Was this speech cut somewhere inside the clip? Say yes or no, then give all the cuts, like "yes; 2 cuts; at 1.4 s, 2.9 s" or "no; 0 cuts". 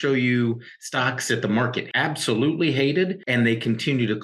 yes; 2 cuts; at 1.8 s, 3.2 s